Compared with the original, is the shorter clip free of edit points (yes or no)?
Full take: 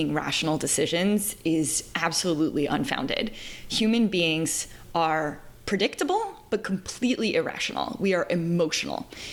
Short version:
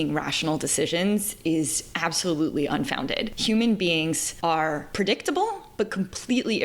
no